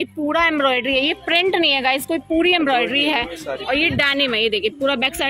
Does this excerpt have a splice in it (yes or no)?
no